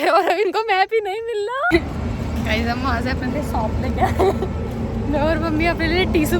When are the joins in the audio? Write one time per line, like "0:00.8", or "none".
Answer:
0:01.7